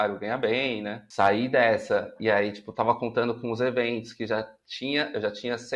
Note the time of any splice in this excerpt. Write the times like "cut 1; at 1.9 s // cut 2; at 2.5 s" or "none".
cut 1; at 1.0 s